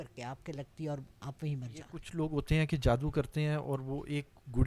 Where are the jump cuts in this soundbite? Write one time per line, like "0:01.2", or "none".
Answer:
0:02.0